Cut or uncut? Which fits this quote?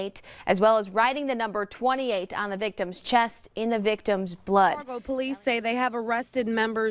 cut